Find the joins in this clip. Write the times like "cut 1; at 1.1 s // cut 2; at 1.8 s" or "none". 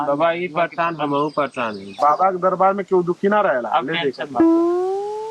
cut 1; at 1.9 s